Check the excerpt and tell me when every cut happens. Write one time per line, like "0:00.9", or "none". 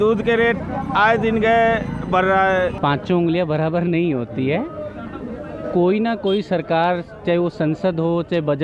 0:02.8

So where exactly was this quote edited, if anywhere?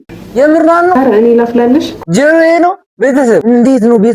0:01.0
0:02.0
0:03.4

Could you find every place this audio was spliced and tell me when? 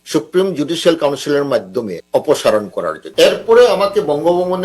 0:02.0
0:03.0

